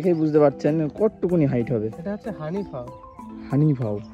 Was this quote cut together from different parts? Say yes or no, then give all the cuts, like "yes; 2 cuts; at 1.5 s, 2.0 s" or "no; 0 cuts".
no; 0 cuts